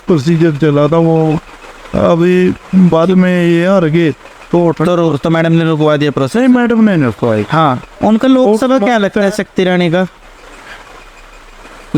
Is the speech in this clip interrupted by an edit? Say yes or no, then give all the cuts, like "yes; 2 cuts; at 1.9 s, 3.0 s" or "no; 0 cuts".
yes; 1 cut; at 8.0 s